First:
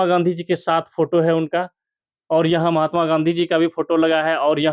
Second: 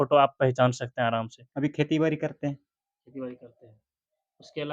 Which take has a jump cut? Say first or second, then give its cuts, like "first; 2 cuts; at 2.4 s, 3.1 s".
second; 1 cut; at 1.4 s